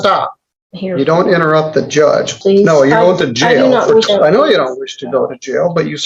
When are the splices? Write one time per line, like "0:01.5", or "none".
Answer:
0:02.3
0:04.1

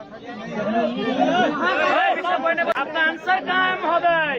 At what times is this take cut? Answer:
0:02.7

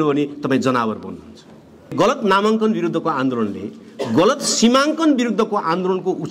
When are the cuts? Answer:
0:01.9

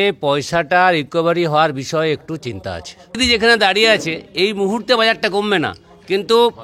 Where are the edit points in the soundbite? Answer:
0:03.2

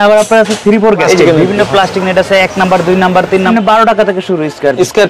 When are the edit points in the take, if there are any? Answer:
0:01.0
0:03.5

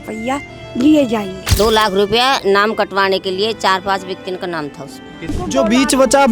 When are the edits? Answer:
0:01.4
0:05.3

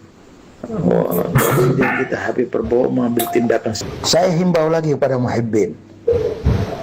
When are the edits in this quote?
0:03.9

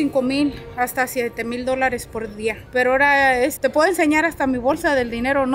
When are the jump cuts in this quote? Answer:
0:02.6
0:03.5

